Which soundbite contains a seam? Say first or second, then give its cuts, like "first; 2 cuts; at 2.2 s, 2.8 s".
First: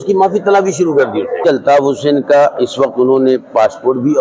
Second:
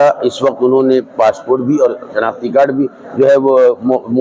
first; 1 cut; at 1.5 s